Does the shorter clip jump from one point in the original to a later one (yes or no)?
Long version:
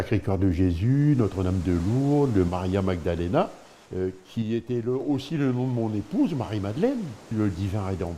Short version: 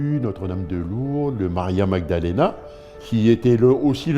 yes